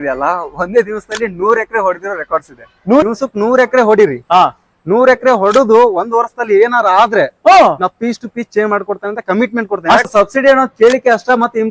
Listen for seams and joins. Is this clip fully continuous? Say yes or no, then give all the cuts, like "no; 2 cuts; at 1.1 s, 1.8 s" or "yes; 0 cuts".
no; 2 cuts; at 3.0 s, 10.1 s